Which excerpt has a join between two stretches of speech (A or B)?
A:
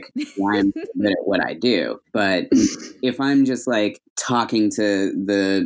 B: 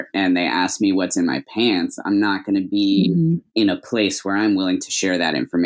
A